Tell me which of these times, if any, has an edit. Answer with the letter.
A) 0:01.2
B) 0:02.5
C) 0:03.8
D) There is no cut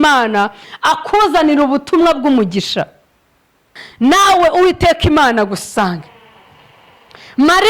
C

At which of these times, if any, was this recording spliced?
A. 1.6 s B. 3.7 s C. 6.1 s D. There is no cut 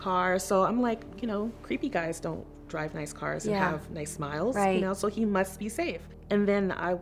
C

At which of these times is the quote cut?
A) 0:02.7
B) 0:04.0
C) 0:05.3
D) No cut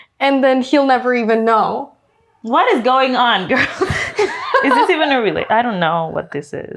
B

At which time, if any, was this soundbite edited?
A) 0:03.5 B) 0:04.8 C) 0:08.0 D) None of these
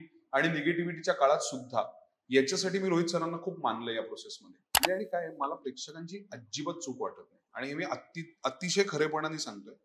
B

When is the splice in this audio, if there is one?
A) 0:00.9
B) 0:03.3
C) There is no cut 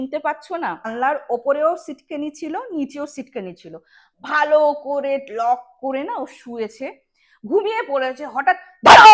A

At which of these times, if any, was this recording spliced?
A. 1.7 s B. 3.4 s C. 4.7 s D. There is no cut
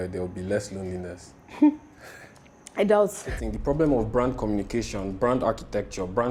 B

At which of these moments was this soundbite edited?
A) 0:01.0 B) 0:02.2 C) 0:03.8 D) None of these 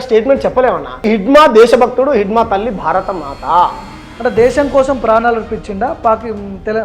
A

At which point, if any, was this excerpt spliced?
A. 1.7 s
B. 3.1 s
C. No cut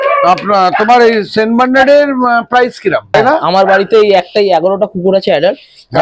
B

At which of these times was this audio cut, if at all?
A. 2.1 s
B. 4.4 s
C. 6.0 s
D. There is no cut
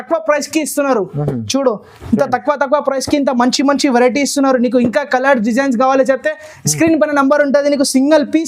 D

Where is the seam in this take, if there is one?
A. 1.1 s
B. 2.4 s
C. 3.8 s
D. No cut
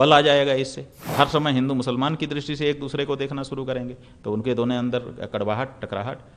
A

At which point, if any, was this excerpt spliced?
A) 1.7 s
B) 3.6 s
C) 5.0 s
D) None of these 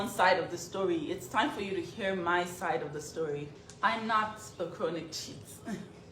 B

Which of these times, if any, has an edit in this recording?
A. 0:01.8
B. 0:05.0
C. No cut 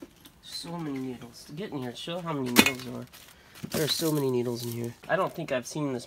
B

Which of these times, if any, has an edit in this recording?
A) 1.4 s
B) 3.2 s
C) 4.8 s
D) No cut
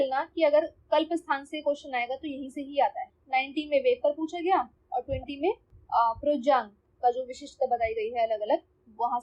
D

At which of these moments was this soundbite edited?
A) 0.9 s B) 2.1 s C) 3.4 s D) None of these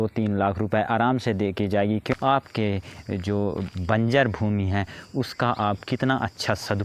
B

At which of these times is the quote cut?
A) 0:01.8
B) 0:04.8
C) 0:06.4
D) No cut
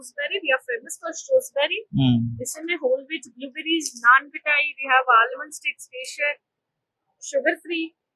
D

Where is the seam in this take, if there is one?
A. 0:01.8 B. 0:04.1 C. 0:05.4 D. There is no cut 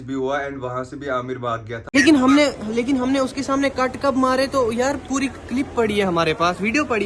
A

